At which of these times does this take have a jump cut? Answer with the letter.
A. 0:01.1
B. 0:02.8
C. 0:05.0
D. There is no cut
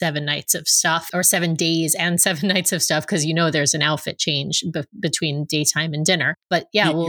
A